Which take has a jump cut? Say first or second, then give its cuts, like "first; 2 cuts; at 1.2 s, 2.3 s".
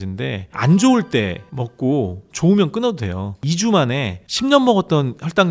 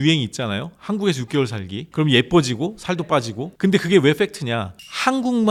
first; 1 cut; at 3.4 s